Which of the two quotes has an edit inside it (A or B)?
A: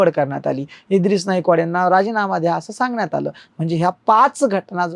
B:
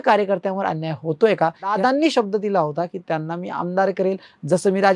B